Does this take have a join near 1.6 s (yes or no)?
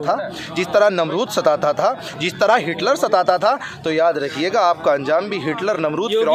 no